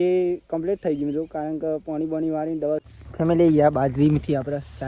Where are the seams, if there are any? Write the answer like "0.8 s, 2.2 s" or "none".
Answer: 2.8 s